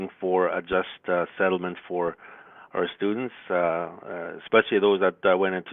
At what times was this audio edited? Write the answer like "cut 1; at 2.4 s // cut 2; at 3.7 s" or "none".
none